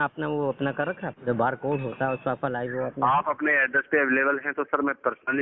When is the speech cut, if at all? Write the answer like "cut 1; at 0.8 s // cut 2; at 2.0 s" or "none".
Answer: cut 1; at 1.1 s